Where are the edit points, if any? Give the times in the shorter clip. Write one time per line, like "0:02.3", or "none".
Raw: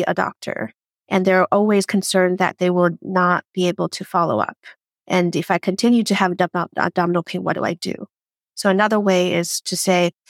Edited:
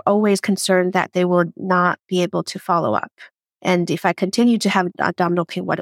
0:04.9